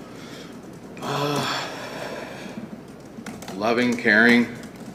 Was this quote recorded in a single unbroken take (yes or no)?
yes